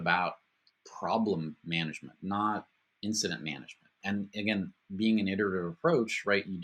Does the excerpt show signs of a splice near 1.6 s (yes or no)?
no